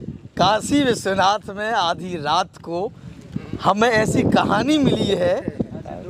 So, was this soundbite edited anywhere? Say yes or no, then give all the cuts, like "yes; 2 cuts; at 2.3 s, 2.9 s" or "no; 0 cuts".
no; 0 cuts